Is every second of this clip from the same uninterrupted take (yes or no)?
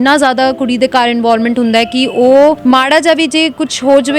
no